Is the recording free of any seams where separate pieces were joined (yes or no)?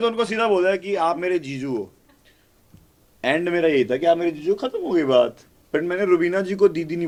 yes